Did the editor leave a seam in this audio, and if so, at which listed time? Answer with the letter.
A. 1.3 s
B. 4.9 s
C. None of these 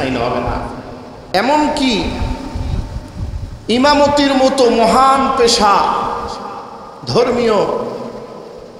A